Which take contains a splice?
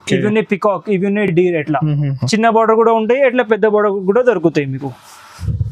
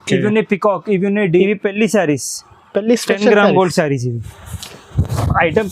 second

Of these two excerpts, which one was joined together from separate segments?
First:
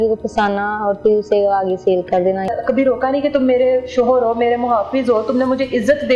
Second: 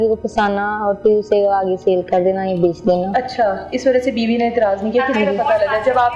first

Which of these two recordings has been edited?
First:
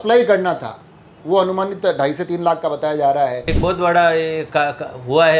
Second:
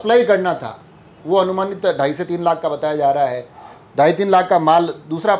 first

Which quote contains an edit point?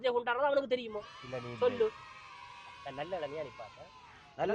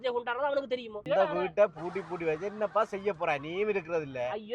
second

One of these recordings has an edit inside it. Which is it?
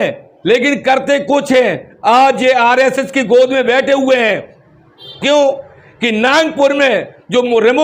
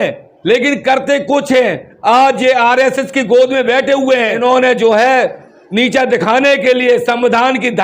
second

